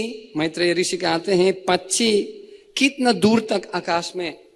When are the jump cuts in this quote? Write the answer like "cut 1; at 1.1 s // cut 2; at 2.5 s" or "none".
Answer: none